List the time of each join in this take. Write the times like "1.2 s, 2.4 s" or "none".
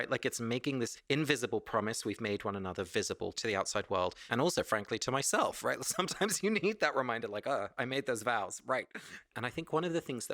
9.2 s